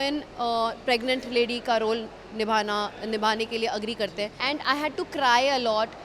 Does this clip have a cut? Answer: yes; 1 cut; at 4.4 s

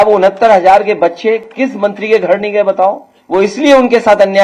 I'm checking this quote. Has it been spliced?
yes; 1 cut; at 3.1 s

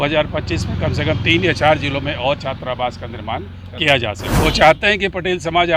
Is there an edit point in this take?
yes; 1 cut; at 4.2 s

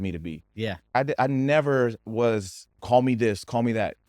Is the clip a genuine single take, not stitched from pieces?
no; 1 cut; at 0.9 s

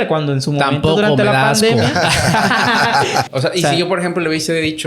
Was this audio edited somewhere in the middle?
yes; 1 cut; at 3.3 s

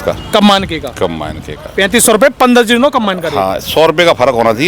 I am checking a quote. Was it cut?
no; 0 cuts

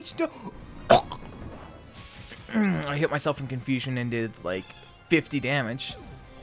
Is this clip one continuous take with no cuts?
yes; 0 cuts

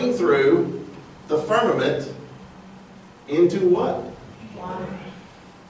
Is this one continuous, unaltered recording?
no; 1 cut; at 1.4 s

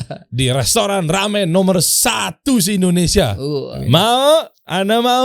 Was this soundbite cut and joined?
yes; 1 cut; at 3.7 s

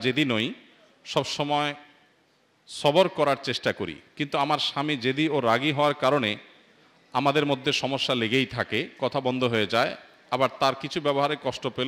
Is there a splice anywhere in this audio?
no; 0 cuts

